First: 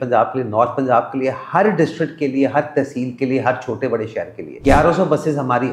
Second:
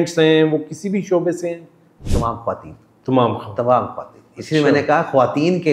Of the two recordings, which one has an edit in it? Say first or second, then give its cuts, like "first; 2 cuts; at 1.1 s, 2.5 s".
first; 1 cut; at 4.4 s